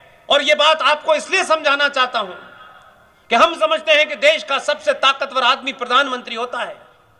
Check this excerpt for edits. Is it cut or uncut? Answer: uncut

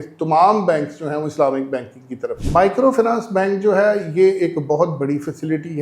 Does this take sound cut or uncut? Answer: cut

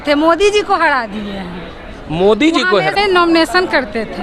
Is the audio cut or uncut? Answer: cut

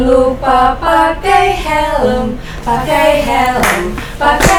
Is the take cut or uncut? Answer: uncut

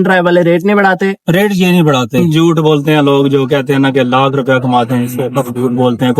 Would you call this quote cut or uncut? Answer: cut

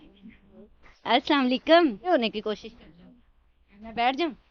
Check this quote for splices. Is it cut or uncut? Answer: cut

